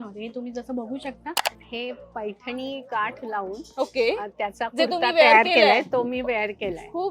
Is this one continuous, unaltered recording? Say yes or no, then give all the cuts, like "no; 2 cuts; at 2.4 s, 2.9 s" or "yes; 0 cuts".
no; 1 cut; at 1.5 s